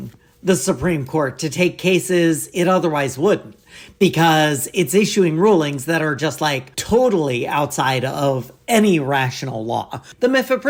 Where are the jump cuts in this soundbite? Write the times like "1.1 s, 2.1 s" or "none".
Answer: none